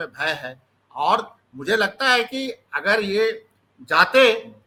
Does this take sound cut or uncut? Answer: uncut